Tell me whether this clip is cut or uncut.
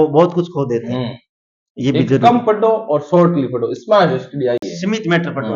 uncut